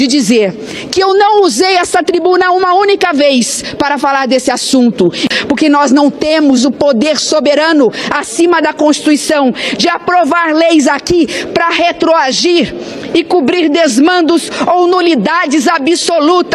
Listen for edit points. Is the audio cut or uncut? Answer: uncut